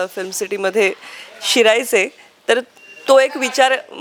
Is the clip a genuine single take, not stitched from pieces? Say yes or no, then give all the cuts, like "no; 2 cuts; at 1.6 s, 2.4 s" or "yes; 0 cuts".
yes; 0 cuts